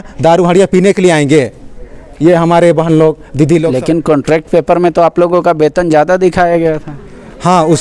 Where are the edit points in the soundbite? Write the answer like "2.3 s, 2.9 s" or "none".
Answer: 3.7 s